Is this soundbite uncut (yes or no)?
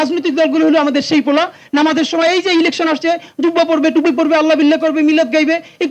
yes